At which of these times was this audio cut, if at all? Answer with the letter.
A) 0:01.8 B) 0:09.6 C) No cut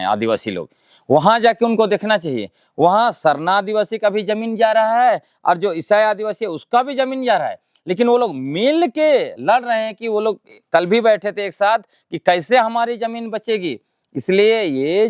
C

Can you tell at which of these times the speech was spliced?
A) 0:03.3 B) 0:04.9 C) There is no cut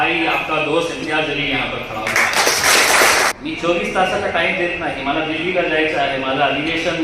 A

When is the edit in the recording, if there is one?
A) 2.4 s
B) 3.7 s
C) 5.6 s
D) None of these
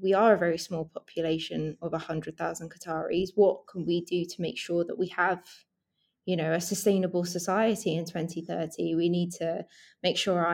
D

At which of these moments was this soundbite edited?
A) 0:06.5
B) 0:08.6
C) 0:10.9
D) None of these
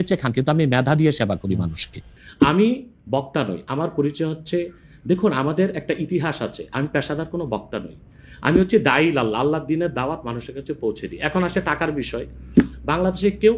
D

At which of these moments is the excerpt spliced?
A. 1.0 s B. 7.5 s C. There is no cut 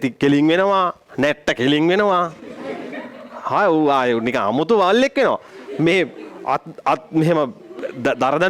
A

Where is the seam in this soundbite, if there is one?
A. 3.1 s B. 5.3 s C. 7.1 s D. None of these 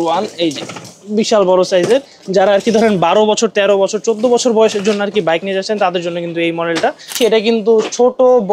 C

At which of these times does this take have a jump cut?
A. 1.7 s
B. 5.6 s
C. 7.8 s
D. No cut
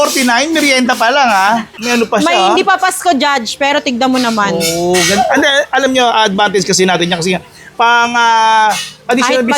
A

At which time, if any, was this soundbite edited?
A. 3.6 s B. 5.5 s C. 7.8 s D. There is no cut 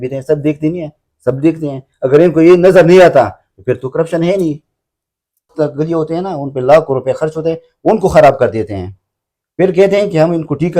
B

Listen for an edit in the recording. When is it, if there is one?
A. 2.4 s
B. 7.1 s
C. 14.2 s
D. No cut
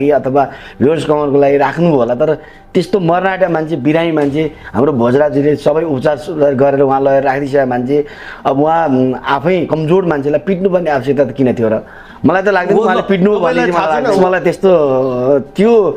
C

